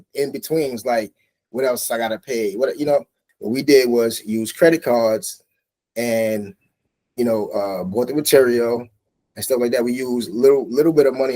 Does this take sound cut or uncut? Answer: cut